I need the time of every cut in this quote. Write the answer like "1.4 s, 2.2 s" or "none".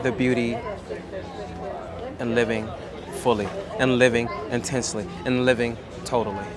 none